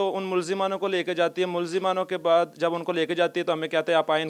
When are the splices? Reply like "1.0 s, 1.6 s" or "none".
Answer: none

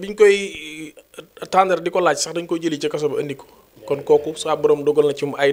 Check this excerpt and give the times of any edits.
none

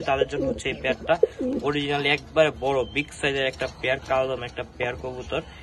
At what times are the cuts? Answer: none

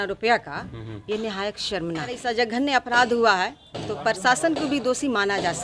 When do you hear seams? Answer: 2.2 s

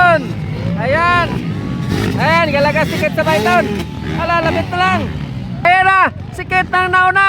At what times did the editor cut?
5.6 s

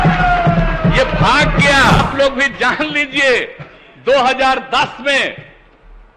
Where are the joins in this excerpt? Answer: 2.0 s

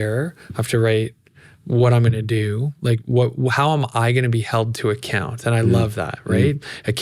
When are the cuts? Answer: none

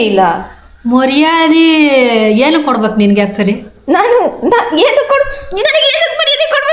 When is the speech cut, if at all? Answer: none

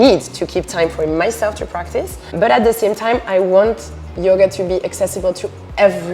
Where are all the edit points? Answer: 2.3 s

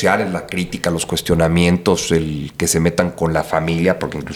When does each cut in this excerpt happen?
none

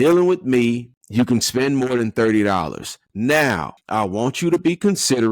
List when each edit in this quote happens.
1.0 s, 3.7 s

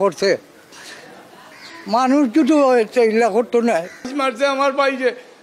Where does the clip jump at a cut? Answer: 4.1 s

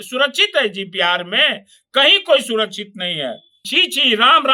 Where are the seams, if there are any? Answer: 3.6 s

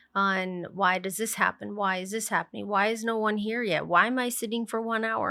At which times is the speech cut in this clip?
none

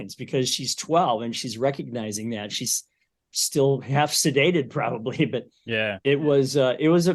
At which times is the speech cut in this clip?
none

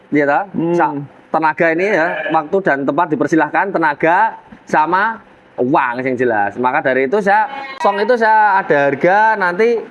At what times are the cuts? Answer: 7.8 s

